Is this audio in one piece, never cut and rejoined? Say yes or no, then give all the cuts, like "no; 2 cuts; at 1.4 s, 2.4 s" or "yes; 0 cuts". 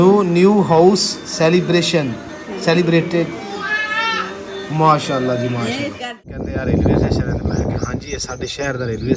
no; 1 cut; at 6.4 s